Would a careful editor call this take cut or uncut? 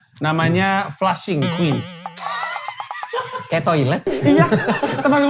uncut